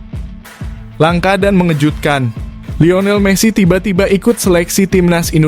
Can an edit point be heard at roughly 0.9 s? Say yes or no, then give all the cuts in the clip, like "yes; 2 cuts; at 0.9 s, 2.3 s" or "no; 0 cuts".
yes; 1 cut; at 0.9 s